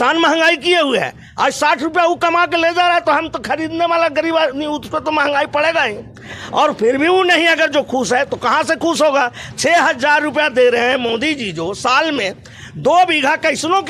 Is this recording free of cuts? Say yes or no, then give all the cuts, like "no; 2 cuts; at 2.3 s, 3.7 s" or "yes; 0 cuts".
yes; 0 cuts